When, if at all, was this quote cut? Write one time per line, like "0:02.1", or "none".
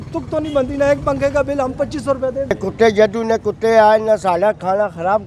0:02.5